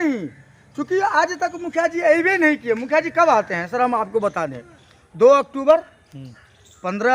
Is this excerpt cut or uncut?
uncut